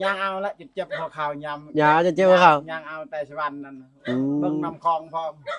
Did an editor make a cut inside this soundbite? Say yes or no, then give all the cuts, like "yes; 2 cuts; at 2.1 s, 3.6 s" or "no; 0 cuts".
no; 0 cuts